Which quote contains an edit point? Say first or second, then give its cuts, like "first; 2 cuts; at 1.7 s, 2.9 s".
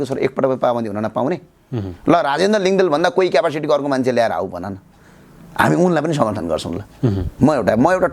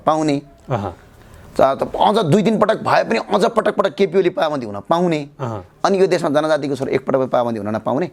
first; 1 cut; at 7.2 s